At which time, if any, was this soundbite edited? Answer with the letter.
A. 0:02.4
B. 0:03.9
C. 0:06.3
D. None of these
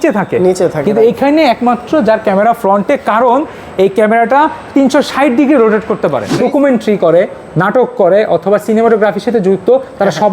C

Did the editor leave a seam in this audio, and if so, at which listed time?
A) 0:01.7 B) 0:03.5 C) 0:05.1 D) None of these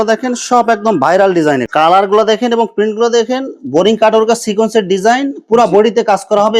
A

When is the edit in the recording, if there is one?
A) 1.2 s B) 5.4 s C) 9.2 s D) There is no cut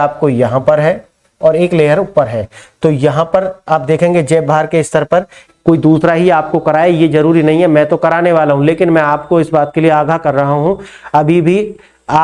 B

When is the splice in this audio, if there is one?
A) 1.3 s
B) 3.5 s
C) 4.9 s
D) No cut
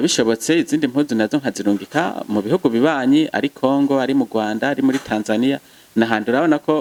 D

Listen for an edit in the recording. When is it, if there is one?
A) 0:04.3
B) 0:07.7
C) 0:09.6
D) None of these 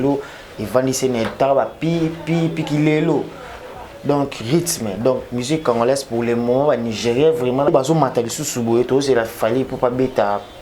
B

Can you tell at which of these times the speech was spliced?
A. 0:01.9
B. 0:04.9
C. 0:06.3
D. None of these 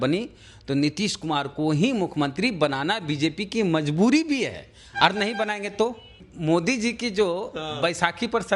C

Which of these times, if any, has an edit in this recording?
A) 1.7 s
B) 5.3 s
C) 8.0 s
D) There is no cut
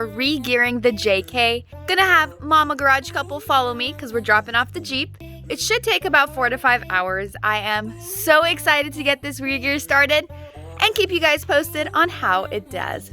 A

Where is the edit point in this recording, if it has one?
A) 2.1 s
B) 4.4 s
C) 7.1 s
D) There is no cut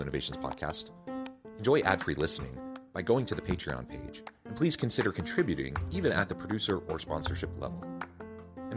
D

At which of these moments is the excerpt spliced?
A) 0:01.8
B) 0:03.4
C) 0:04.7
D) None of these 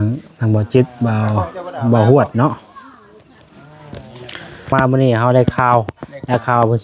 C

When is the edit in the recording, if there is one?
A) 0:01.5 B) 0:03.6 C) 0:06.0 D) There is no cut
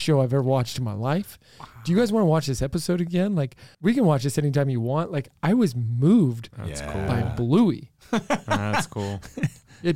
B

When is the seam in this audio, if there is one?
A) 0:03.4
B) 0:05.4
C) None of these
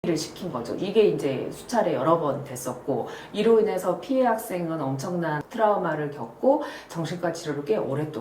B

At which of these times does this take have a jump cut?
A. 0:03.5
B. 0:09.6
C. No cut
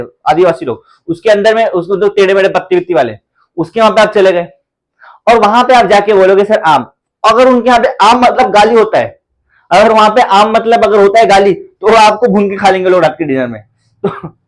C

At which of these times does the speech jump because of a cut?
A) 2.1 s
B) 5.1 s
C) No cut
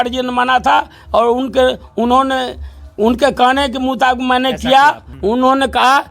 B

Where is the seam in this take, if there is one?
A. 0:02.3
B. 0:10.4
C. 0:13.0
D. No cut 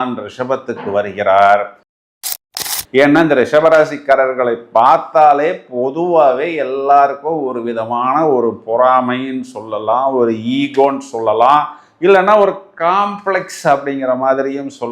A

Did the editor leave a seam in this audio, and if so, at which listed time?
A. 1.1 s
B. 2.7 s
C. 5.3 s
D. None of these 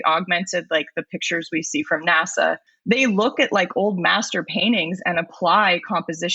B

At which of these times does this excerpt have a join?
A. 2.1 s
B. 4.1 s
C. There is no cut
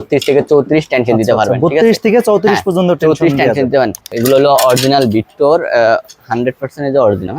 B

